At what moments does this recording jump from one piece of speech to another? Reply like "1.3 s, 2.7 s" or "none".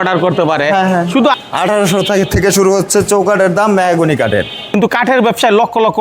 1.4 s, 4.7 s